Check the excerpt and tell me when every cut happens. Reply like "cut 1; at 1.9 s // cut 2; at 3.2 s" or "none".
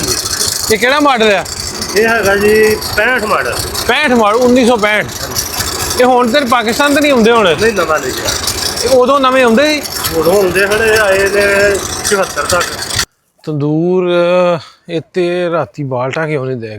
cut 1; at 12.8 s